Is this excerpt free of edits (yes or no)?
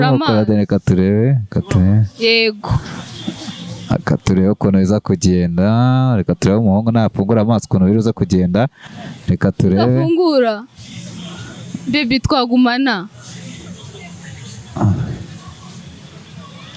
yes